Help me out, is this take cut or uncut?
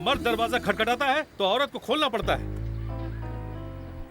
uncut